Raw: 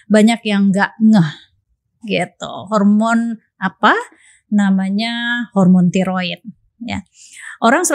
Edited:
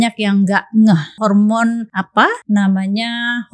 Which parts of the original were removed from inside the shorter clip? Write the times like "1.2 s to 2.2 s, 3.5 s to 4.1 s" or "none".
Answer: 1.4 s to 2.6 s, 3.6 s to 4.1 s